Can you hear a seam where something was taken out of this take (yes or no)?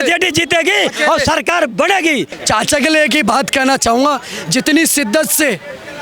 yes